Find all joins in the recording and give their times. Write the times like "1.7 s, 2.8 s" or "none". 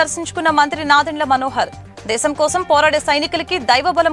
none

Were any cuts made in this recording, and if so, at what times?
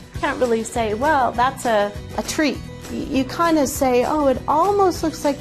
2.7 s

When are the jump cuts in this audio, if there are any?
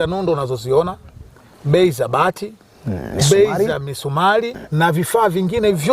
4.5 s

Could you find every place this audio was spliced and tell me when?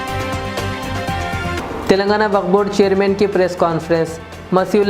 1.6 s

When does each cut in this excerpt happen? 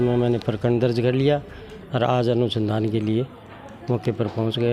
none

